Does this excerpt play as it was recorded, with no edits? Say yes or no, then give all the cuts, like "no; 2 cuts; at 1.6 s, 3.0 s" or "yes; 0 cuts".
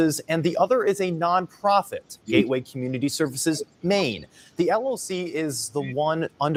yes; 0 cuts